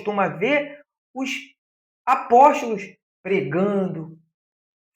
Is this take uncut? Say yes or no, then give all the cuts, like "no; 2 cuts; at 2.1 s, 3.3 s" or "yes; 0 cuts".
yes; 0 cuts